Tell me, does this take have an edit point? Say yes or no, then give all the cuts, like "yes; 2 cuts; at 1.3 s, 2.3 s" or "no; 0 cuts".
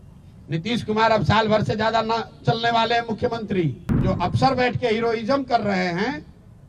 yes; 1 cut; at 4.0 s